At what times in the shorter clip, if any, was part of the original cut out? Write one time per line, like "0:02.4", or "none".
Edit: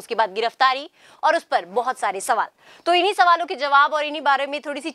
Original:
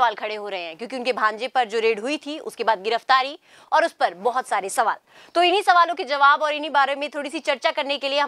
none

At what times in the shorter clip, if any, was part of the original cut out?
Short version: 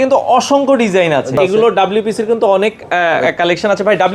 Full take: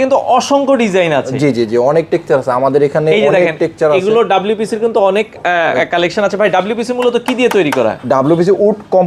0:01.4

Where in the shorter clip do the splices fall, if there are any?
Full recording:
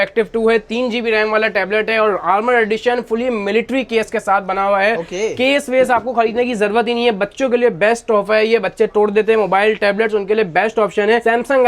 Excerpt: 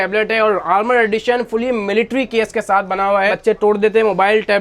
0:03.3

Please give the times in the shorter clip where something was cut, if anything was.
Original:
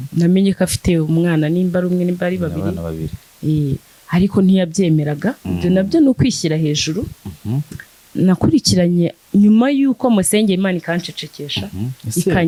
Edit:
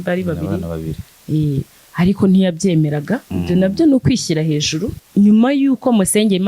0:05.0

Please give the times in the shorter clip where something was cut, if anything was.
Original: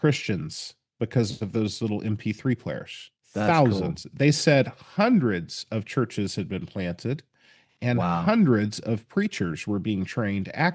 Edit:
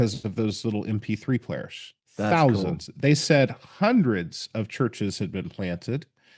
none

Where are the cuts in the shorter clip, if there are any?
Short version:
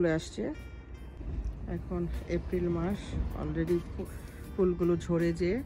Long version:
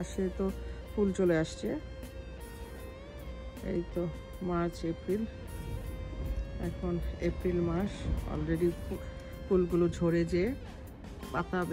0:01.1

